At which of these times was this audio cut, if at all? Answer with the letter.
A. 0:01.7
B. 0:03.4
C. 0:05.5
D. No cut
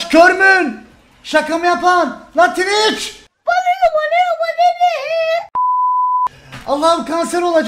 D